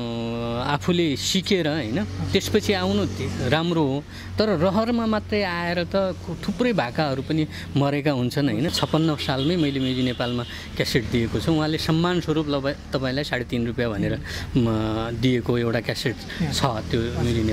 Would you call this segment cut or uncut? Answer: cut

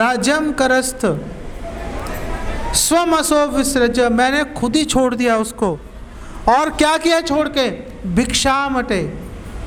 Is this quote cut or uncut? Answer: uncut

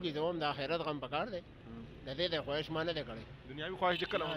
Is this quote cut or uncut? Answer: uncut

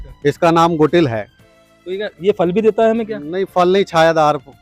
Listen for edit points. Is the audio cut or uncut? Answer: uncut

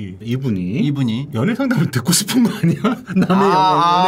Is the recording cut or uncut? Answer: uncut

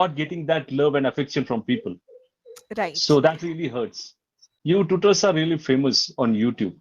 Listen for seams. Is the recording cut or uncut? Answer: cut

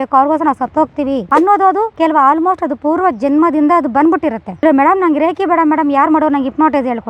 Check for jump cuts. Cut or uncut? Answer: cut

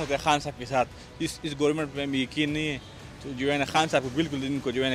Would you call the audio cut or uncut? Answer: uncut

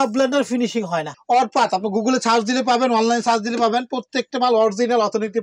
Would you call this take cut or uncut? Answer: cut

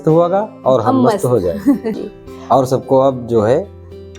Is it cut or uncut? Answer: cut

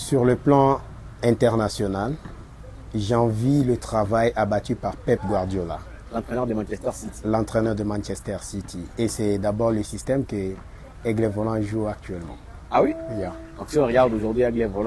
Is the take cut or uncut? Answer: uncut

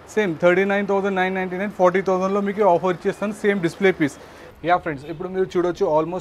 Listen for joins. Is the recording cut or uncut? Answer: cut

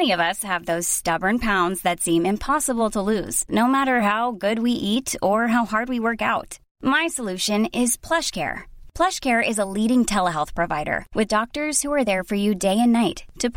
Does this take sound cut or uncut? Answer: uncut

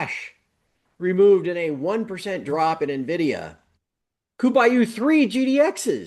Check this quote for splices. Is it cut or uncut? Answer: uncut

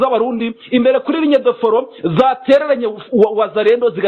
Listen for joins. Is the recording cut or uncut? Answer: uncut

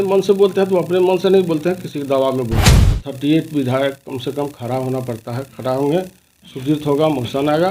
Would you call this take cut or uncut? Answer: cut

